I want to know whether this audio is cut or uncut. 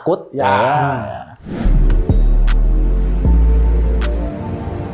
uncut